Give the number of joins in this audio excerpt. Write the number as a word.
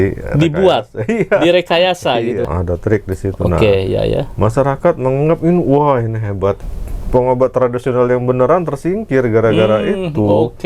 two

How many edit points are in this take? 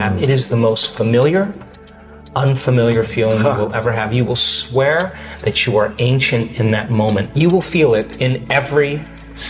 two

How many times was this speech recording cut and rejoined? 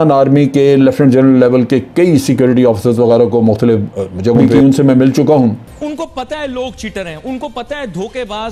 two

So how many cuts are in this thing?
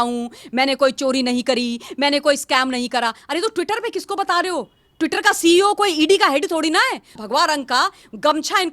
one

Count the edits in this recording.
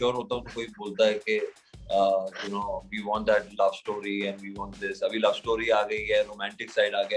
zero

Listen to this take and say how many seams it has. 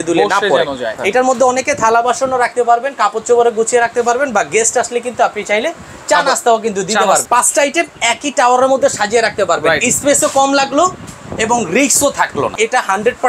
three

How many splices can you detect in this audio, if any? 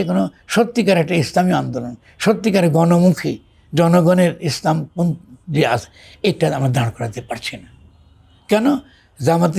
zero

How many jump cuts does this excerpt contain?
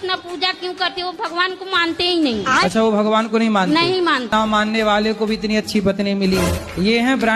one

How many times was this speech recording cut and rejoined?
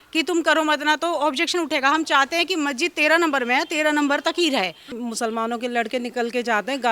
one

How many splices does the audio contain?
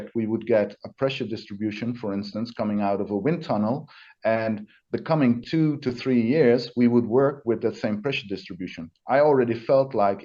zero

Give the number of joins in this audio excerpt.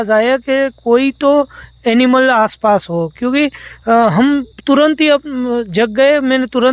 zero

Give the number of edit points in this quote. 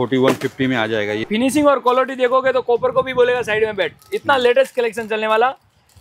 one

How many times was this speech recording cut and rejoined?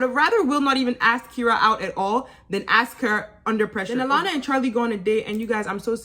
one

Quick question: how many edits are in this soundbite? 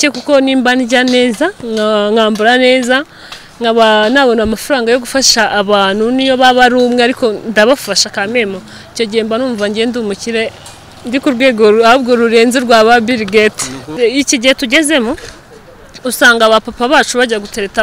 one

